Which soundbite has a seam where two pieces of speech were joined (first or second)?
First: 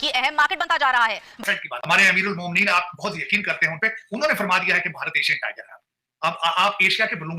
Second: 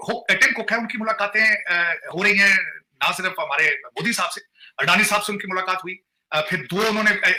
first